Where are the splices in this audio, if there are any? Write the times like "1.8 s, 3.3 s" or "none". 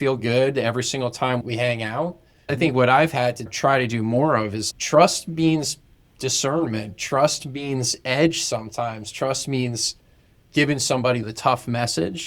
1.4 s, 3.5 s, 4.6 s, 11.3 s

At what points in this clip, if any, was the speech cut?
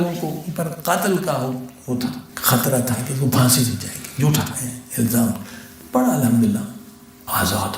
2.3 s

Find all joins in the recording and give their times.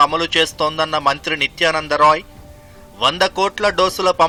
none

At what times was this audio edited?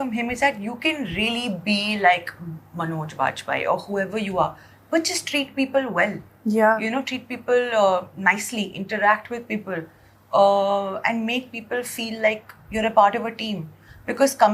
none

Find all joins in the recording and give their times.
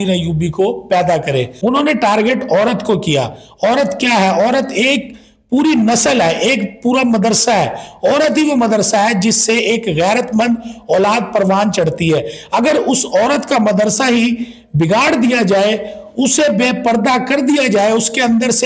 1.5 s

